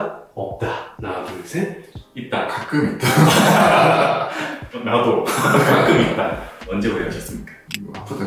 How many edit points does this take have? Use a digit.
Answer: 0